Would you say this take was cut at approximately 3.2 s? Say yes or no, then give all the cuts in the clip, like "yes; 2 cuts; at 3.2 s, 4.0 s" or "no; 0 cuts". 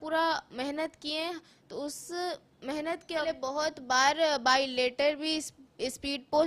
yes; 1 cut; at 3.2 s